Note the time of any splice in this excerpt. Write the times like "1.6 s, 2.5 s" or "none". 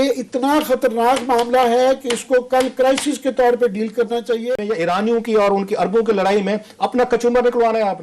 4.5 s